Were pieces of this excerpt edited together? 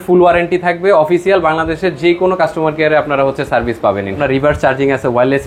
yes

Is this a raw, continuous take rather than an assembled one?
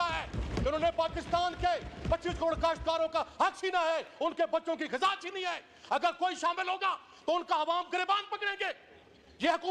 yes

